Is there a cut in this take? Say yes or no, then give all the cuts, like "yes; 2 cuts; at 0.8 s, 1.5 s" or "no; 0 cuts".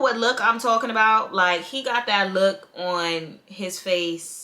no; 0 cuts